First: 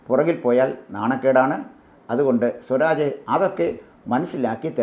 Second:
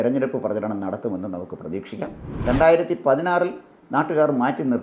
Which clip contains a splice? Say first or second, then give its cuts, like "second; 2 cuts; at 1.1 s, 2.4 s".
second; 1 cut; at 2.2 s